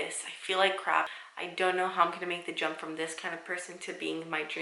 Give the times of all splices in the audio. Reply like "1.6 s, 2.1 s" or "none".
1.1 s